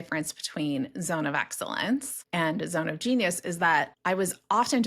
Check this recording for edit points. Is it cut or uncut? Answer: cut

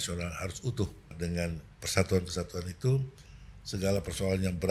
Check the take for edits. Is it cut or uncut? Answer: cut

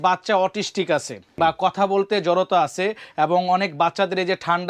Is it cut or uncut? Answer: cut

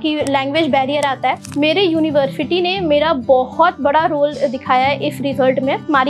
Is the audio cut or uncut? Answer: cut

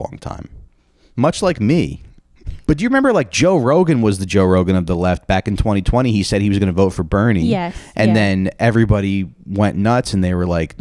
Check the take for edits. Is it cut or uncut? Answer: cut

